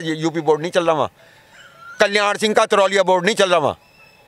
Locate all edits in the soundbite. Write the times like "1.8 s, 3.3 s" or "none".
none